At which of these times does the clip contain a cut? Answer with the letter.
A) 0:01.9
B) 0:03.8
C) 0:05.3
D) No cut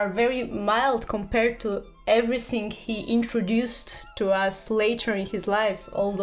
D